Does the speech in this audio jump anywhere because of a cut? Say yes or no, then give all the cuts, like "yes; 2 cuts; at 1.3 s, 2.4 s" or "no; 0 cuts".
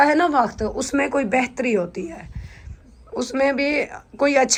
no; 0 cuts